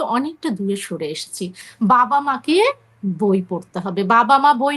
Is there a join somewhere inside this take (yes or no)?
yes